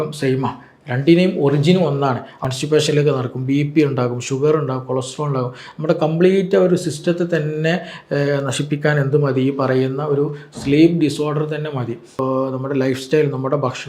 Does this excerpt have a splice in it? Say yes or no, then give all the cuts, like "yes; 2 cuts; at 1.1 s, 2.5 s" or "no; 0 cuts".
yes; 2 cuts; at 2.4 s, 12.1 s